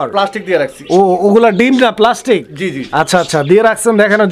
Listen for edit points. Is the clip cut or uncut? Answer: uncut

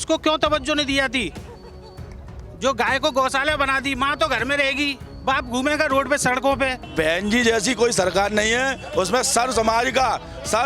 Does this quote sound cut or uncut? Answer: cut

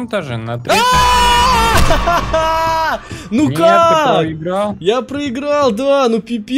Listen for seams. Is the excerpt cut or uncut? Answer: uncut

